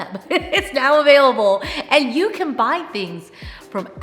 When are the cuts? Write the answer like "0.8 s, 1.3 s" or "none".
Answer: none

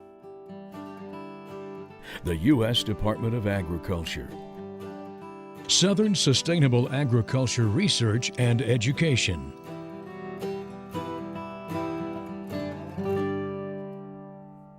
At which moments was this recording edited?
9.5 s

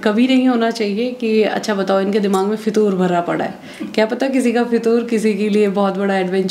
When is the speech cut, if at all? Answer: none

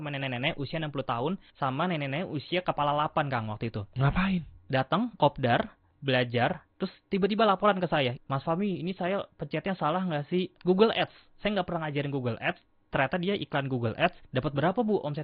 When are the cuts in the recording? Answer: 1.5 s, 5.9 s, 8.2 s, 10.6 s, 14.2 s

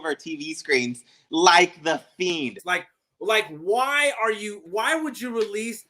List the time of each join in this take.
2.6 s, 4.6 s

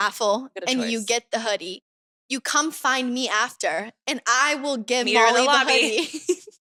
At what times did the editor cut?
none

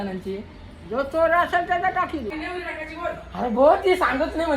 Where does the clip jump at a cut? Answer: 2.3 s

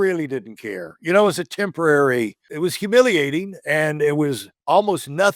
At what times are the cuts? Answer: 2.4 s, 4.5 s

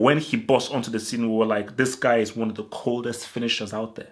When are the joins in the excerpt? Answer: none

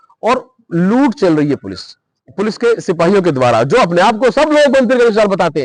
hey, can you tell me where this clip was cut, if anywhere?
none

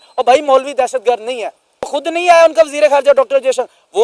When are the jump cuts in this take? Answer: 1.9 s

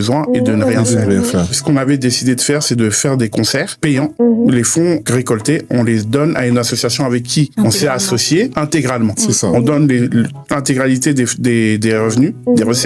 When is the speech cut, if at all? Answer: 1.6 s, 3.8 s, 5.0 s, 7.5 s, 8.5 s, 10.4 s

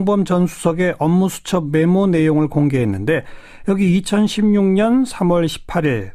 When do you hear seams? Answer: none

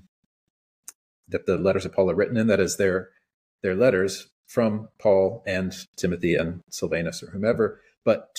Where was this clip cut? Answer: none

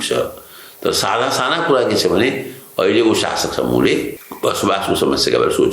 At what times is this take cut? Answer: 4.2 s

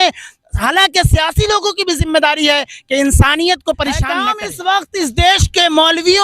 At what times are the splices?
4.1 s

